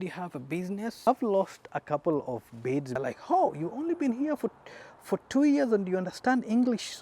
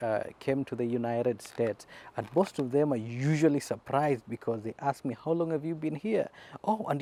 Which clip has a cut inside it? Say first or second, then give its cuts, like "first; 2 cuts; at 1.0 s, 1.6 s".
first; 2 cuts; at 1.1 s, 3.0 s